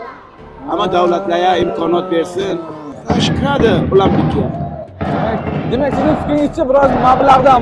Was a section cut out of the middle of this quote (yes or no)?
yes